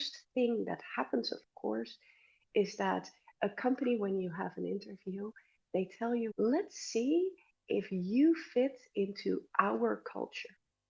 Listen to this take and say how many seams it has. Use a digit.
0